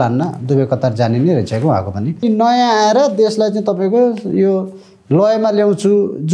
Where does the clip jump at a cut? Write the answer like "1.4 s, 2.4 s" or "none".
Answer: 2.2 s